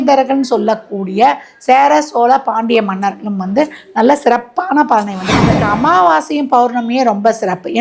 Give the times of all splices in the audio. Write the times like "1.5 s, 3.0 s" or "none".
5.6 s